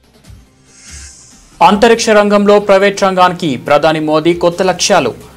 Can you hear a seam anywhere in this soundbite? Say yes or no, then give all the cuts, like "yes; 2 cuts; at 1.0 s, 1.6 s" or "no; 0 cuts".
yes; 1 cut; at 1.6 s